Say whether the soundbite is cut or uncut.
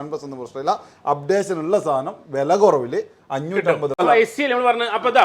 cut